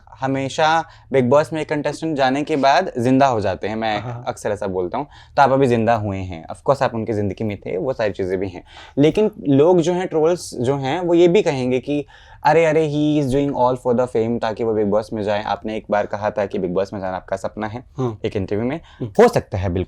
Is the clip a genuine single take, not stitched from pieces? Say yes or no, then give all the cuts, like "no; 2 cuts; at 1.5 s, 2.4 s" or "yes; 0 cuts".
yes; 0 cuts